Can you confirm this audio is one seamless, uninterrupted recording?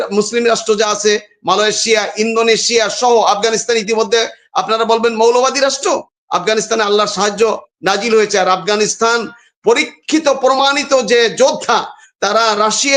yes; 0 cuts

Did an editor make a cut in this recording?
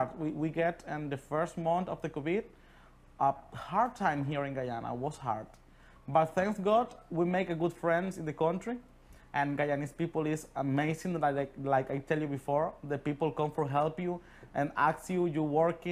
no; 0 cuts

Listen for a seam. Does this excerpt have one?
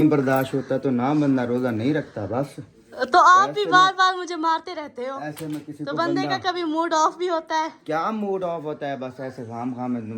no; 0 cuts

